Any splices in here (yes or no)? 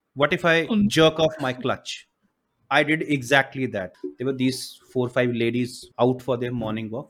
yes